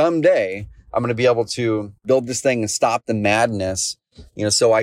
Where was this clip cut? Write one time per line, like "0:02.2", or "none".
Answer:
0:02.0